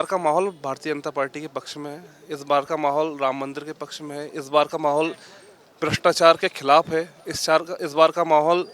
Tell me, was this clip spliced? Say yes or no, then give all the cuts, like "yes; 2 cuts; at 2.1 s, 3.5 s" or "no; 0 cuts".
no; 0 cuts